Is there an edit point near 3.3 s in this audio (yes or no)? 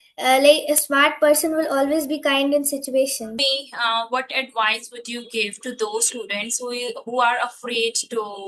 yes